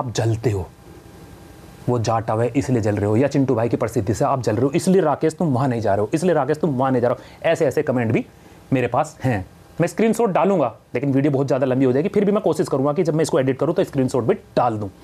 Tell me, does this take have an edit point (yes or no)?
no